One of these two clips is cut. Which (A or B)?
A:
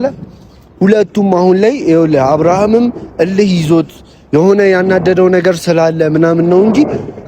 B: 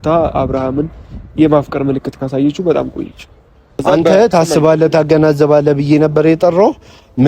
B